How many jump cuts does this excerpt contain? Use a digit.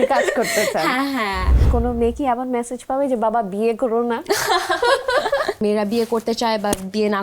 2